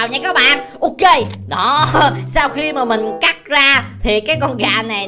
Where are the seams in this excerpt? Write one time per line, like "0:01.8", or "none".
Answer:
none